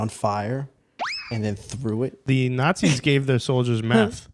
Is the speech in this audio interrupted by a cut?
yes; 1 cut; at 2.2 s

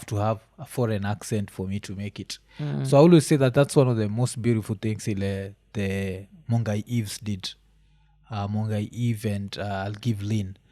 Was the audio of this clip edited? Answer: no; 0 cuts

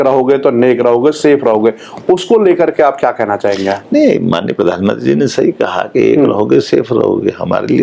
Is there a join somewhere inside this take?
no; 0 cuts

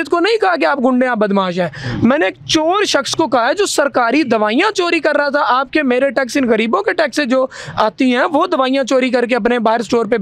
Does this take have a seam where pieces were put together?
no; 0 cuts

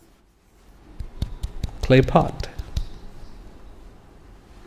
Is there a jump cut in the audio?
no; 0 cuts

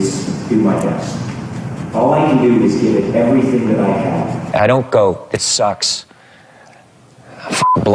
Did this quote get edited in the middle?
yes; 1 cut; at 4.4 s

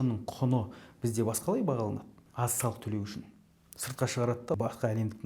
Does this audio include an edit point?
yes; 2 cuts; at 2.2 s, 4.5 s

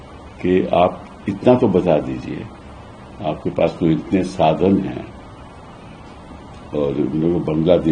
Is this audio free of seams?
yes; 0 cuts

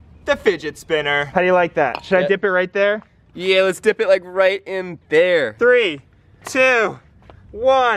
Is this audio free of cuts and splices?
no; 2 cuts; at 1.2 s, 5.5 s

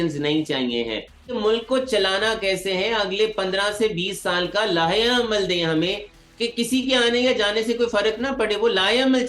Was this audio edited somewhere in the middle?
yes; 1 cut; at 1.3 s

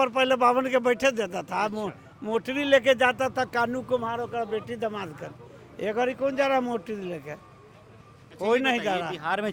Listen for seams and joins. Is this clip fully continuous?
yes; 0 cuts

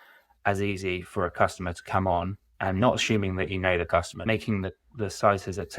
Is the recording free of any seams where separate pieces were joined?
no; 2 cuts; at 2.4 s, 4.2 s

